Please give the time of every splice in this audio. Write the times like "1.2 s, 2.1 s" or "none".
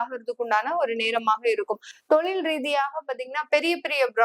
none

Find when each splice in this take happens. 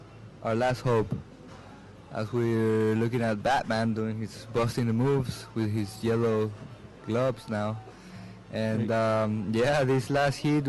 5.0 s

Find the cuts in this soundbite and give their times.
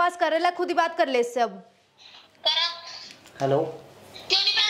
none

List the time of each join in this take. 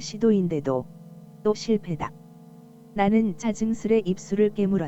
none

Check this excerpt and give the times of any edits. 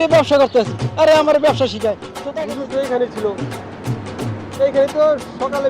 2.1 s

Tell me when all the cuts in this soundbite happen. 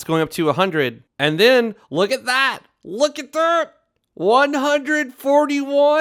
1.0 s

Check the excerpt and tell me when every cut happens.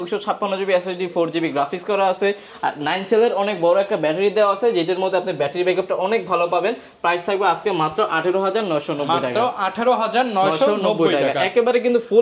none

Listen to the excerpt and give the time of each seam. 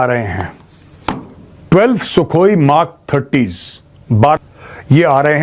4.4 s

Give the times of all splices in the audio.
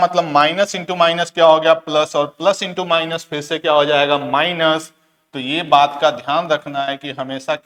none

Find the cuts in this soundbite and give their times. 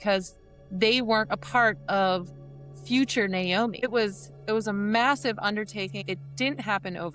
3.8 s, 6.0 s

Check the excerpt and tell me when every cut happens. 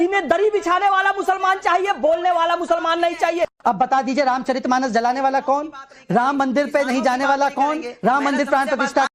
3.6 s

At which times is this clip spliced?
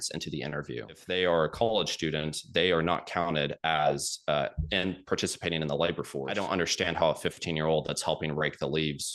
1.0 s, 6.3 s

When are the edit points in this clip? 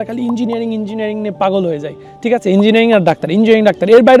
none

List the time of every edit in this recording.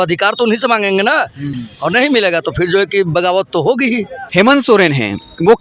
1.5 s, 4.1 s

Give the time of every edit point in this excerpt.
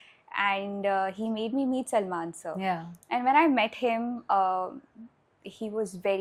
none

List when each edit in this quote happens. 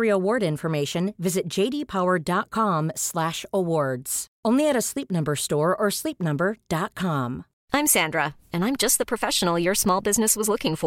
7.5 s

